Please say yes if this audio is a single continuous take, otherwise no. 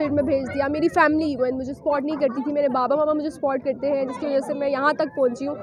yes